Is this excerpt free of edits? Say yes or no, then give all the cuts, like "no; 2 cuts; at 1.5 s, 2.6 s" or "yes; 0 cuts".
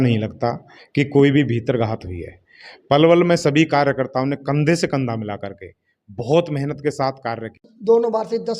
no; 1 cut; at 7.7 s